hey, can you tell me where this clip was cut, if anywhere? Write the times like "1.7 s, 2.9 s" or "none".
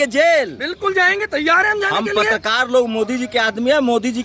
none

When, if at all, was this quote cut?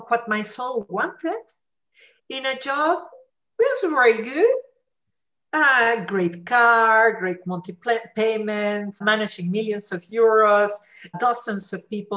9.0 s, 11.2 s

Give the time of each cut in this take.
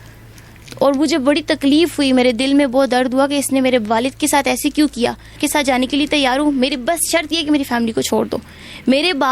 5.4 s

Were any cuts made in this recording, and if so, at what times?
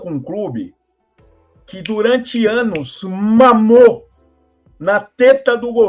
none

